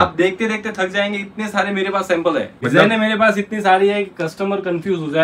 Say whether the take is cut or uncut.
cut